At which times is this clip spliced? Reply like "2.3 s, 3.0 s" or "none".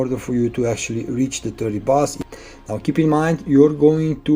2.2 s